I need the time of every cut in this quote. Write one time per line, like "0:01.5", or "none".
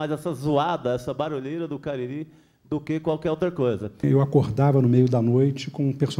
0:04.0